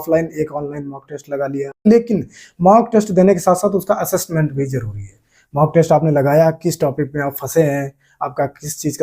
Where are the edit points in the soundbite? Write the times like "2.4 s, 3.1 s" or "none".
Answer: 1.9 s